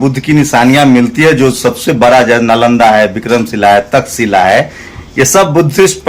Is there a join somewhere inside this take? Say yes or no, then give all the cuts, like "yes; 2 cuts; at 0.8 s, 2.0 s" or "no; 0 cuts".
no; 0 cuts